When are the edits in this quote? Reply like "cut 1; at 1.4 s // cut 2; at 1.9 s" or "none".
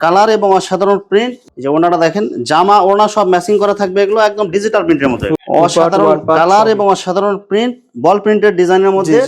cut 1; at 1.4 s // cut 2; at 5.3 s

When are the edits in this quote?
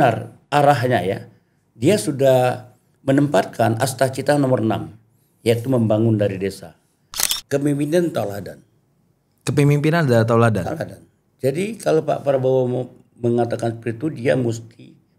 cut 1; at 7.2 s

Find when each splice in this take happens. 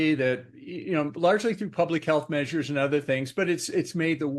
none

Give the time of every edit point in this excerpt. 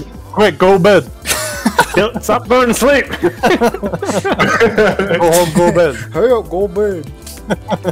none

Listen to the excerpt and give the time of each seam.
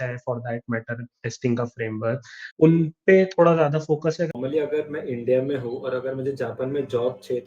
cut 1; at 2.6 s // cut 2; at 4.3 s

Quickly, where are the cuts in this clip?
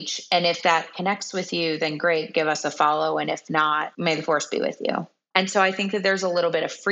cut 1; at 3.9 s // cut 2; at 5.1 s

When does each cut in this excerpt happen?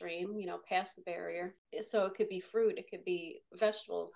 cut 1; at 1.6 s

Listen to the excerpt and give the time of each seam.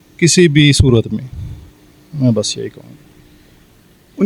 none

